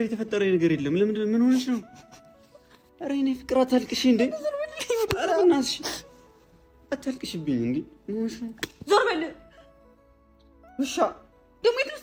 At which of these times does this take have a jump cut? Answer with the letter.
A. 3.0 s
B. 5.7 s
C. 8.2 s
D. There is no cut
D